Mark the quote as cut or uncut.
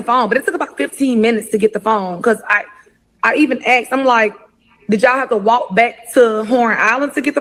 uncut